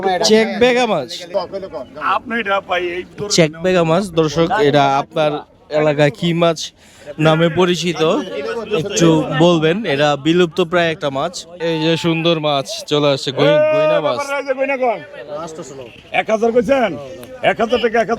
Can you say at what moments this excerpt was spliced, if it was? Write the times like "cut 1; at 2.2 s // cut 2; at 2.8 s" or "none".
cut 1; at 1.3 s // cut 2; at 11.5 s